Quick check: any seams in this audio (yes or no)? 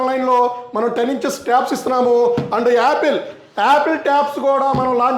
no